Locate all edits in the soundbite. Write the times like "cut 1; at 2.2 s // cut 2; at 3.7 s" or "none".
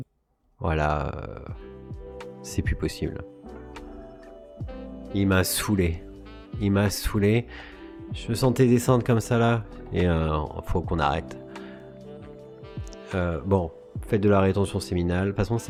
none